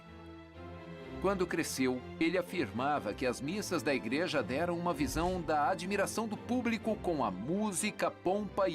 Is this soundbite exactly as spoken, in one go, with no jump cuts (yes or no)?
no